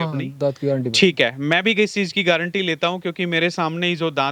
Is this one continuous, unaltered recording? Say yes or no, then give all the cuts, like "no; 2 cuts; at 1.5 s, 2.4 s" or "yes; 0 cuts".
yes; 0 cuts